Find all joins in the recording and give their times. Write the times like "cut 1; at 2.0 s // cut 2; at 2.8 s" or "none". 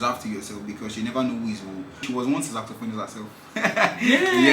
cut 1; at 2.0 s